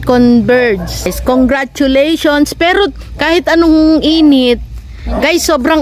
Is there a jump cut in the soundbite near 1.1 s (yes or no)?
yes